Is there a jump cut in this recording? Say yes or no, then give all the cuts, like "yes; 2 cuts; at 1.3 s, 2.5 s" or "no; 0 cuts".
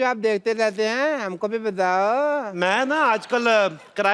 no; 0 cuts